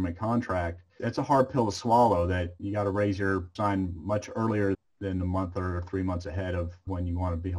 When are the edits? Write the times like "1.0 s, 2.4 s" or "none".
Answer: 0.9 s, 2.6 s, 3.5 s, 4.8 s, 6.8 s